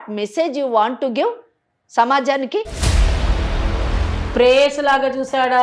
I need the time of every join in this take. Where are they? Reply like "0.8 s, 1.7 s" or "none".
4.1 s